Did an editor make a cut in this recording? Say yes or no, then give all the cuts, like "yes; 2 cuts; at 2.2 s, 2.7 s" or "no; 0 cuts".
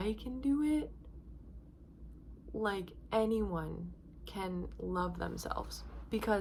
no; 0 cuts